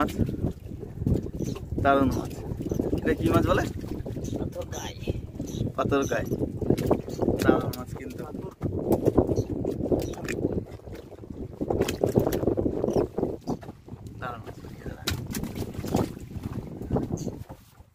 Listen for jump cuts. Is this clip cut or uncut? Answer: uncut